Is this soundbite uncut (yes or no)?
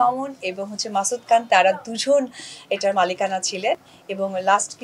yes